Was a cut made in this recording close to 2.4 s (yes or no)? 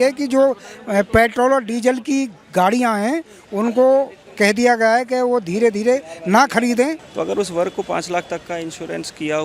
no